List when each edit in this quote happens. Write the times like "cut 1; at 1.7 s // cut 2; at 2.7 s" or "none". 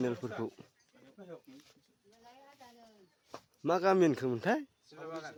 none